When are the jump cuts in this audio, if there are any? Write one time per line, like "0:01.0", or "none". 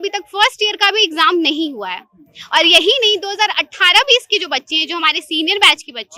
none